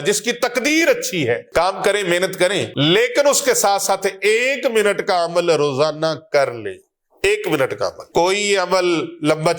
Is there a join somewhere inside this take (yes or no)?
yes